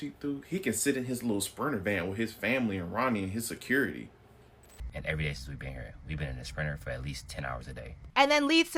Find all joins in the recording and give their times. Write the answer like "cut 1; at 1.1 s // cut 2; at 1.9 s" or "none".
none